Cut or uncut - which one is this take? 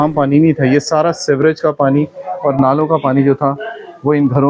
uncut